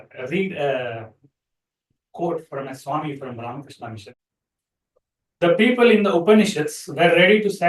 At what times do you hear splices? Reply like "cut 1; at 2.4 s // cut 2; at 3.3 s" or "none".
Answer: cut 1; at 4.0 s